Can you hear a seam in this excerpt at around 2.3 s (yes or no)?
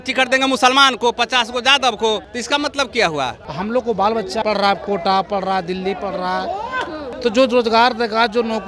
yes